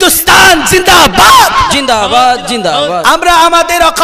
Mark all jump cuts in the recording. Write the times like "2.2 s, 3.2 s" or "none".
none